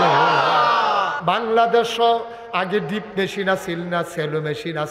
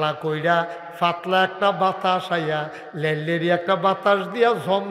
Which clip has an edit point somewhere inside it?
first; 1 cut; at 1.1 s

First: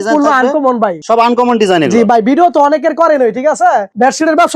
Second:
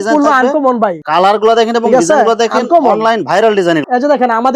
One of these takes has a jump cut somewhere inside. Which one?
second; 2 cuts; at 1.0 s, 3.8 s

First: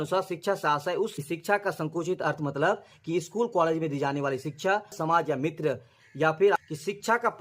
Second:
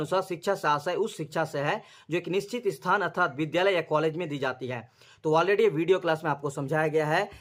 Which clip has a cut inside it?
first; 3 cuts; at 1.2 s, 4.9 s, 6.6 s

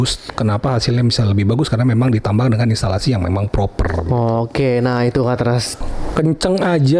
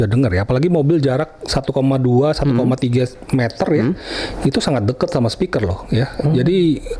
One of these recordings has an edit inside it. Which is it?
first; 1 cut; at 5.7 s

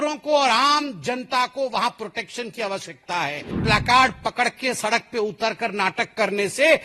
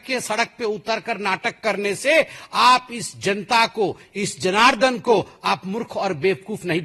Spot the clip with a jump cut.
first; 1 cut; at 3.6 s

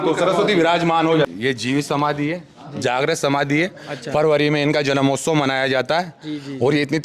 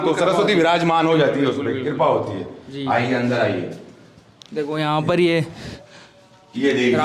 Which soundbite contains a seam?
first; 1 cut; at 1.3 s

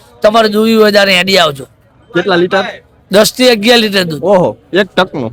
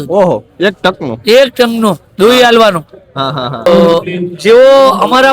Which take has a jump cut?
second; 1 cut; at 3.7 s

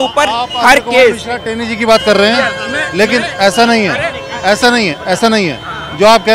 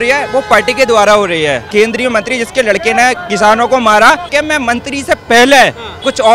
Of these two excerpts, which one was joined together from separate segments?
second; 2 cuts; at 1.6 s, 4.3 s

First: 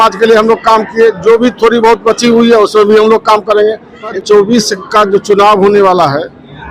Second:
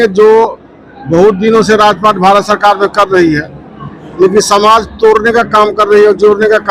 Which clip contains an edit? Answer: first; 1 cut; at 4.2 s

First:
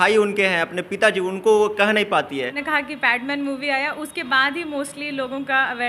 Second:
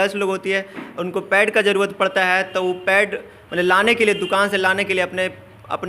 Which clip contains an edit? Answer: first; 1 cut; at 2.6 s

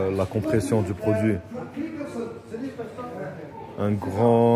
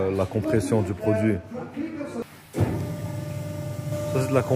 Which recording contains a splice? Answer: second; 1 cut; at 2.2 s

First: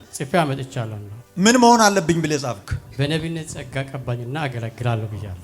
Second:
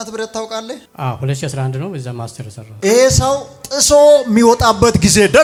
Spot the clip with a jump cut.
first; 2 cuts; at 1.1 s, 2.8 s

